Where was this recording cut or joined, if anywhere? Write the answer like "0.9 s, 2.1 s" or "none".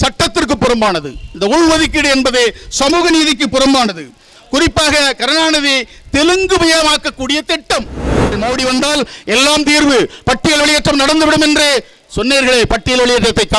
8.4 s